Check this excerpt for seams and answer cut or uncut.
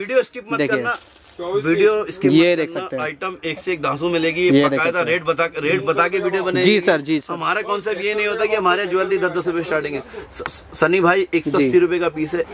uncut